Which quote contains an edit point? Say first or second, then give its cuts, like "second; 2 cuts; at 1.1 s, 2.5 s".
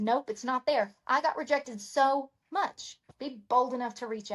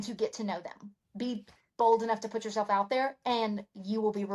first; 1 cut; at 3.1 s